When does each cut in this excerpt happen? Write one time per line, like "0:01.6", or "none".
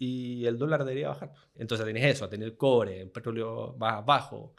0:01.5